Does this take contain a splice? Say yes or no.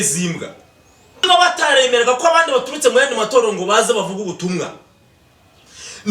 yes